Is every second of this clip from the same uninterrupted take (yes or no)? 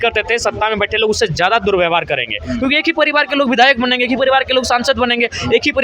yes